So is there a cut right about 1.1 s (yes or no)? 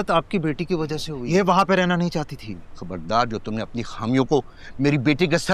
yes